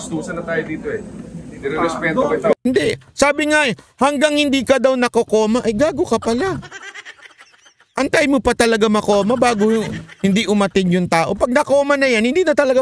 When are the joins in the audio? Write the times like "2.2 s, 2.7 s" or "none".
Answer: 2.6 s